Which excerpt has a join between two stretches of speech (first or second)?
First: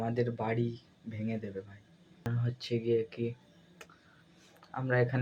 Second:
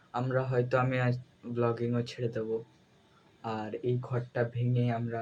first